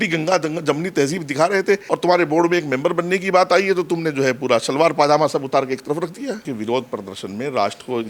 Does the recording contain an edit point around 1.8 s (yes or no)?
yes